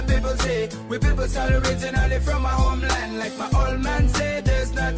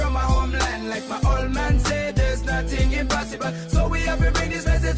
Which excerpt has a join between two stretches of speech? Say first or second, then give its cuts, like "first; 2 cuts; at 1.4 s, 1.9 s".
second; 1 cut; at 4.0 s